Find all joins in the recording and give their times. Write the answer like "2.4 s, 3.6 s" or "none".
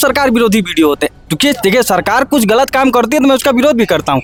none